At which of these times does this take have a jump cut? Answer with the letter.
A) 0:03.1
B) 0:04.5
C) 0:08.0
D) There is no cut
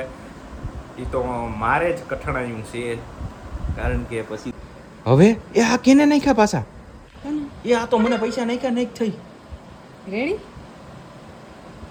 D